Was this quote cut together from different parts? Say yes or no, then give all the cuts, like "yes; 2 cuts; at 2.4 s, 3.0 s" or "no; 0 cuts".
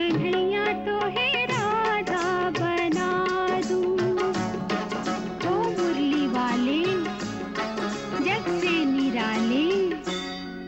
no; 0 cuts